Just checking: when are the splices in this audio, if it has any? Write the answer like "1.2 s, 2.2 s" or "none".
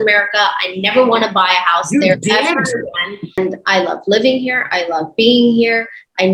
3.4 s

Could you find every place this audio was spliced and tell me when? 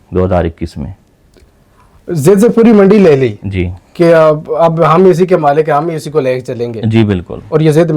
none

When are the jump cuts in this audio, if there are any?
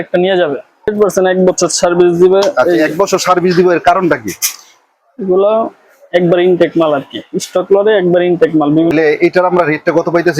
0.9 s, 8.9 s

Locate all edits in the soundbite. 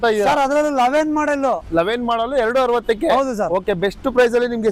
none

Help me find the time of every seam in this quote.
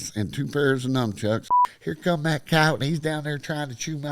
1.5 s

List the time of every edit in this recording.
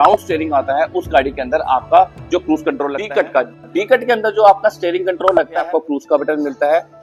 2.9 s, 5.7 s

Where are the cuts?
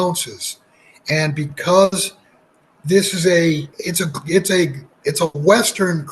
3.8 s, 4.9 s

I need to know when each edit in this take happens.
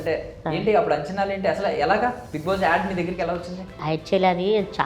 3.8 s

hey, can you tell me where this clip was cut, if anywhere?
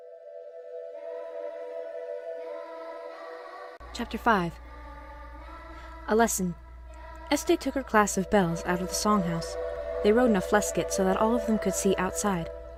none

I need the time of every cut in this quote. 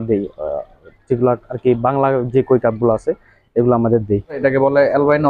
4.4 s

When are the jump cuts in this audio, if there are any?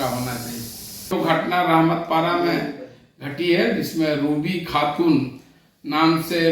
1.2 s

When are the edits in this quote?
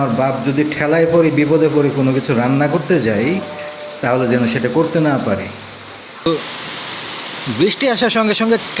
6.3 s

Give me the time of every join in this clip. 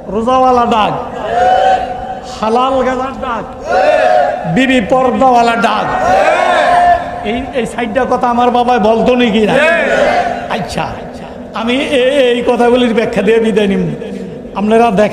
none

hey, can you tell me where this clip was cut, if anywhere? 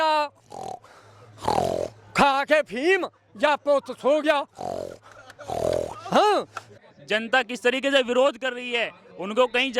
6.6 s

